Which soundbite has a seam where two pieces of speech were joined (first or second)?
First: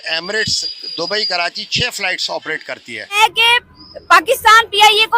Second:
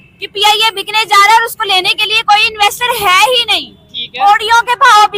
first